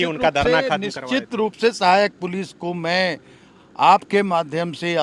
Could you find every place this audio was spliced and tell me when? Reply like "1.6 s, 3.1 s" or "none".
none